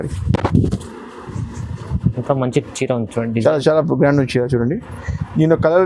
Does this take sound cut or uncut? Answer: uncut